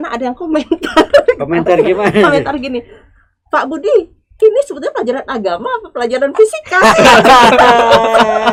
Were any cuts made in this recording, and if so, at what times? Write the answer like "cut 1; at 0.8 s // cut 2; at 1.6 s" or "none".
none